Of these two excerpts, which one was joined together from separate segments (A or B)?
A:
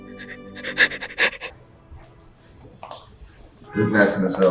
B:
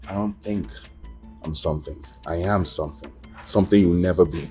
A